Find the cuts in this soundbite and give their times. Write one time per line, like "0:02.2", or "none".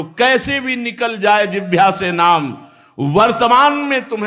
none